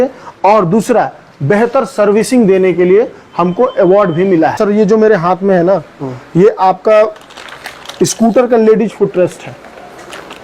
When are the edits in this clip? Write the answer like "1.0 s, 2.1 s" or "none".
4.6 s